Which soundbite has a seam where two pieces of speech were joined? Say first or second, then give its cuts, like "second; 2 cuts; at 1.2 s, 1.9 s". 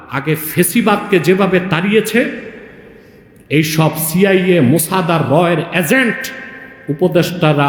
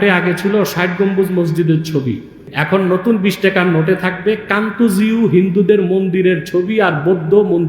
second; 1 cut; at 2.5 s